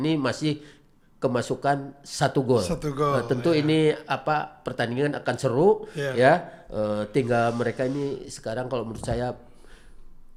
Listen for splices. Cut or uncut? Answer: uncut